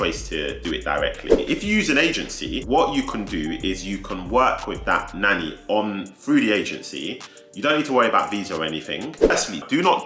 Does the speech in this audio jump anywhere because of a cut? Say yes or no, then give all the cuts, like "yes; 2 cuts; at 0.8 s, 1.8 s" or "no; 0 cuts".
yes; 3 cuts; at 1.3 s, 2.5 s, 9.3 s